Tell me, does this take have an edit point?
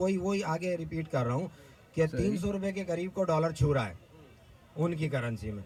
no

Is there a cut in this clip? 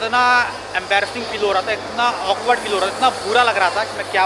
no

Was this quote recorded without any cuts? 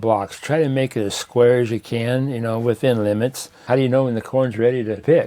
no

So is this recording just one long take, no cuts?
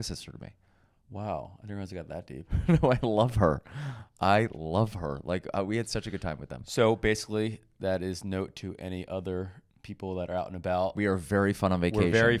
yes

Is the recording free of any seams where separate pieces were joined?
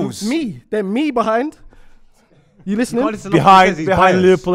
no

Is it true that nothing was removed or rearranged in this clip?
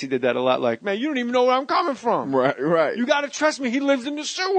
no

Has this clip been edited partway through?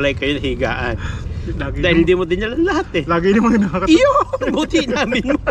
no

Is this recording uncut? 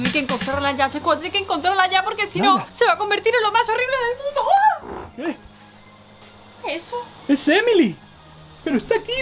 yes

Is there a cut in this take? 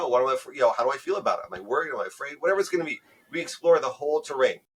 no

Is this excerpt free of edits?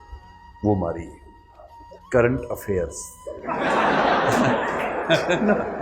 no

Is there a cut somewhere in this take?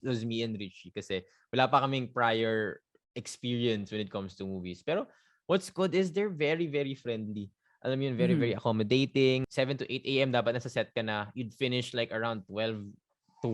yes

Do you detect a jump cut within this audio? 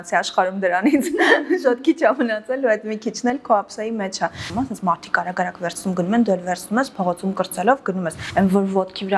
yes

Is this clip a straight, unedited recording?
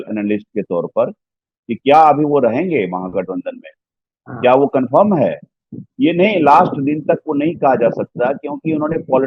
yes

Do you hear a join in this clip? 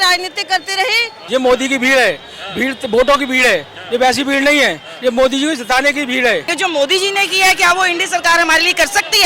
yes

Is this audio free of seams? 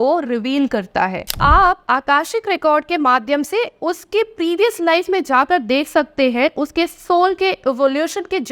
no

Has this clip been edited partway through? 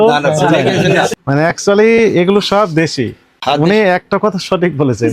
yes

